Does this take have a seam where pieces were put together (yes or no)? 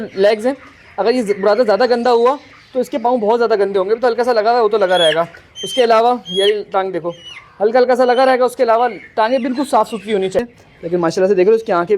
yes